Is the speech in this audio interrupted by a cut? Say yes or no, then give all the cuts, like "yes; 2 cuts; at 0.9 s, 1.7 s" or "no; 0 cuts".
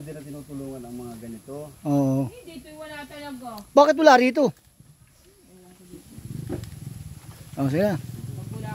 no; 0 cuts